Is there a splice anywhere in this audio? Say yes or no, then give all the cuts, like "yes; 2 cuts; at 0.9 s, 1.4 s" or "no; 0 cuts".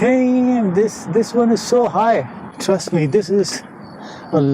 yes; 1 cut; at 2.4 s